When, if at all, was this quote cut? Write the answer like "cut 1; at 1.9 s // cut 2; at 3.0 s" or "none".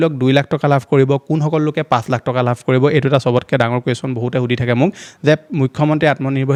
none